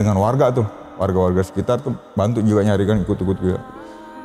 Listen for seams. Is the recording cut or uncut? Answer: uncut